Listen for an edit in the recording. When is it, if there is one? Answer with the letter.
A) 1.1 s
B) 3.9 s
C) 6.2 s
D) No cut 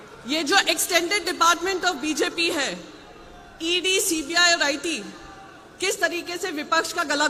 D